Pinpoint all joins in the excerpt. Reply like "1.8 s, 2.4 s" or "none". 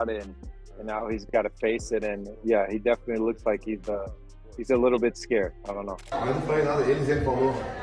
6.0 s